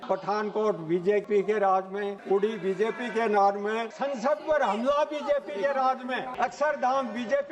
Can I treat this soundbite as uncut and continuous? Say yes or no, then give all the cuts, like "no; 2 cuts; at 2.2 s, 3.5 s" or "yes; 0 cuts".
no; 4 cuts; at 1.2 s, 2.1 s, 3.9 s, 6.3 s